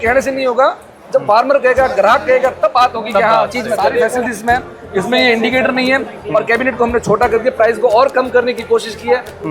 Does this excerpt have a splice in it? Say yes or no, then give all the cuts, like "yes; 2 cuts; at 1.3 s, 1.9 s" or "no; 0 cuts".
yes; 1 cut; at 4.2 s